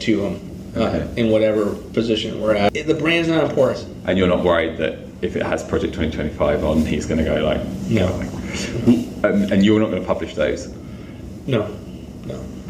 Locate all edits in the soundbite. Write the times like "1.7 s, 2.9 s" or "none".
2.7 s